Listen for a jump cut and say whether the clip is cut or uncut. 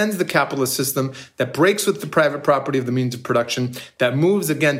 uncut